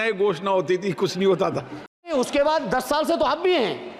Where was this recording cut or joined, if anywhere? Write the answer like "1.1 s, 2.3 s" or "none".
2.1 s